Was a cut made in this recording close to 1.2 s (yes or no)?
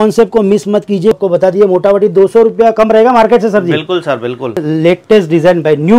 yes